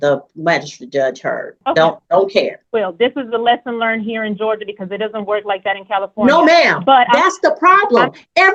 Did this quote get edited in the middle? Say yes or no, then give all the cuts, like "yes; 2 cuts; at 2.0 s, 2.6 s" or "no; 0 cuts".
yes; 2 cuts; at 1.5 s, 2.6 s